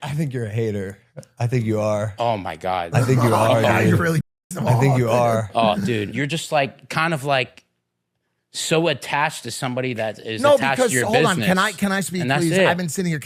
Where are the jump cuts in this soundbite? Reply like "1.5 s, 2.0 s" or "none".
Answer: none